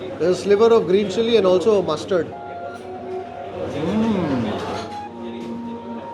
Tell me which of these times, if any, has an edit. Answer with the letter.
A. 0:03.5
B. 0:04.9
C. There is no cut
C